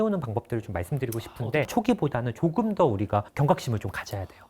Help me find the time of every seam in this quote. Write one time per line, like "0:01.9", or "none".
0:01.7
0:03.3